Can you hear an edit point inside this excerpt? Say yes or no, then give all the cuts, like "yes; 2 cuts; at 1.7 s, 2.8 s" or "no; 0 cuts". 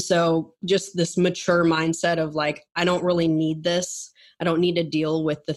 no; 0 cuts